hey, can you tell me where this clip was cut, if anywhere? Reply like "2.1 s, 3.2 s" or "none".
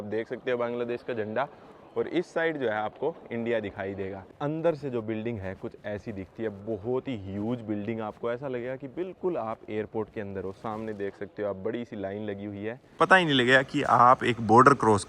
4.2 s, 12.8 s

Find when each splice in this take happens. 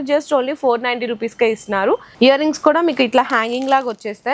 2.1 s

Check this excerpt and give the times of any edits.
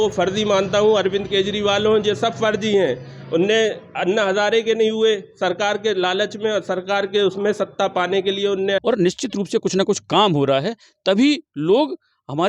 8.8 s

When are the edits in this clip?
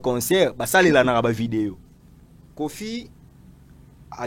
none

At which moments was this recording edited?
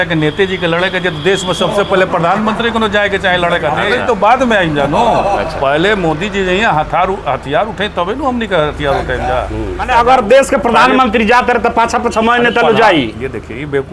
4.0 s, 9.9 s

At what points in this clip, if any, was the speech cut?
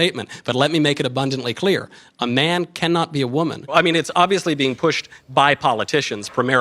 3.7 s

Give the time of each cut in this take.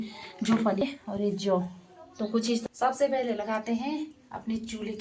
0.8 s, 2.6 s

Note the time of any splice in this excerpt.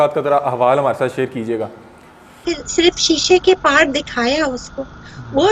2.3 s

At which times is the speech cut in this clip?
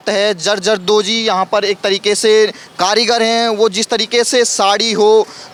none

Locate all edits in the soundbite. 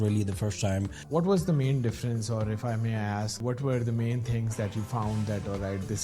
1.0 s, 3.3 s

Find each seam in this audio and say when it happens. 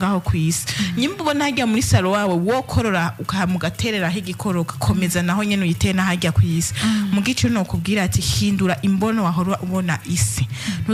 none

